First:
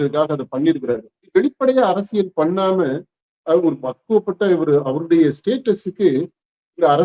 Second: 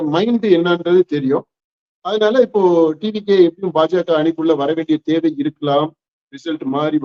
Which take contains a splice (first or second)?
first